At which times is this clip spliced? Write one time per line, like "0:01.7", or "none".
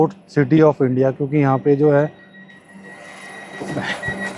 none